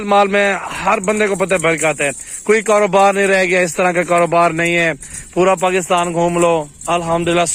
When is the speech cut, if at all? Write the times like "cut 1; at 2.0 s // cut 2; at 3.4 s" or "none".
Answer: none